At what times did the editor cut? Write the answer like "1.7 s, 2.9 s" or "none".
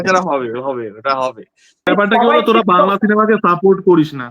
1.9 s

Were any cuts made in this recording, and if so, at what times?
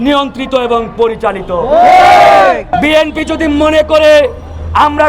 2.7 s

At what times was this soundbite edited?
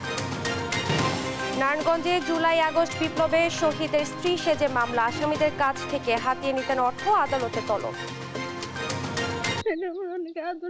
none

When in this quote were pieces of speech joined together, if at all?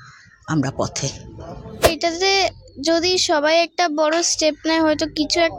1.8 s

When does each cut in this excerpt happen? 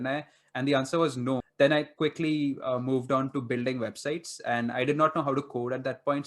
1.5 s

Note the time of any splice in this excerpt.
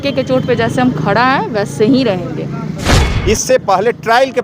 3.1 s

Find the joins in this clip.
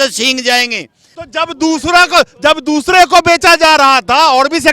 1.1 s

